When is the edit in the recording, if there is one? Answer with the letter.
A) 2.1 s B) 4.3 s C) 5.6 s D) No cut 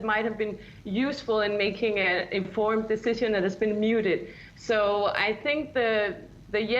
D